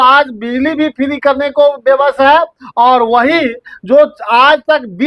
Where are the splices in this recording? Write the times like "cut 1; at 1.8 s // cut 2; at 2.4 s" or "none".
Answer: none